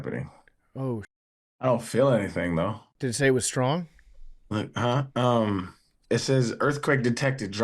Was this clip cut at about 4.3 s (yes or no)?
no